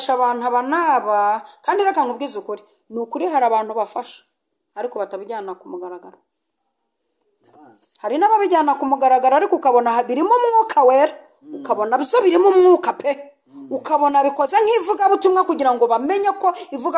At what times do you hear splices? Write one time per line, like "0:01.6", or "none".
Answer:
none